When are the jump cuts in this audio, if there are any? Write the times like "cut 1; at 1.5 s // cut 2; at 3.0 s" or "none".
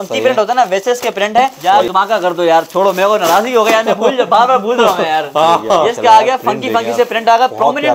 cut 1; at 1.6 s // cut 2; at 5.9 s